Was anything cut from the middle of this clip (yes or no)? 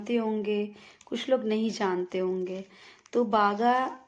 no